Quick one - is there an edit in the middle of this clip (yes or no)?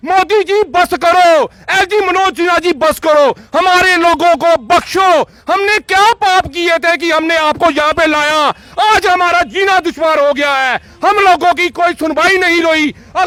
no